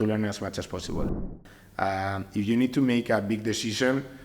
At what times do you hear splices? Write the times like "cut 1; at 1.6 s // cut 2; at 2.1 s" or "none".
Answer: cut 1; at 1.3 s